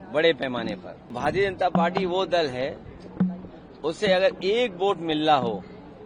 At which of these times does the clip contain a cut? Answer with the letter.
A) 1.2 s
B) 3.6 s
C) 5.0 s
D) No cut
A